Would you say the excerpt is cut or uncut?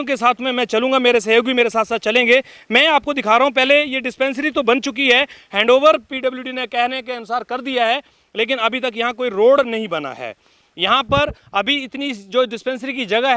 uncut